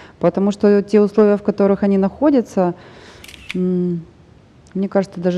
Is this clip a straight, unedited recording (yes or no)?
yes